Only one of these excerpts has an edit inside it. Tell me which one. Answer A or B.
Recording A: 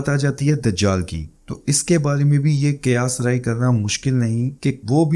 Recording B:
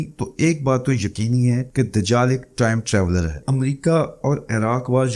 B